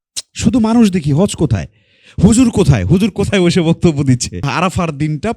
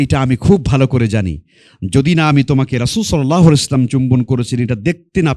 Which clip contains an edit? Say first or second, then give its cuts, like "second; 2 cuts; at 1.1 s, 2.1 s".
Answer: first; 1 cut; at 4.4 s